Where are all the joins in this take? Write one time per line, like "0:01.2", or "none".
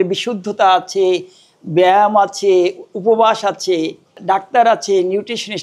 0:04.1